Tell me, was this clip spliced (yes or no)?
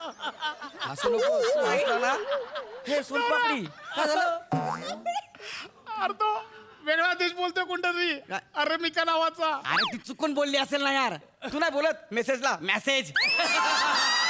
no